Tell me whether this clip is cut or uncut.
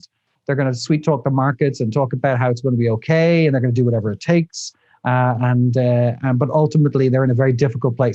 uncut